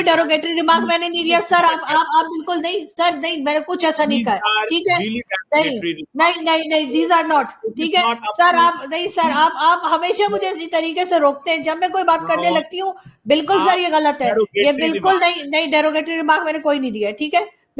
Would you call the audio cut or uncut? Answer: uncut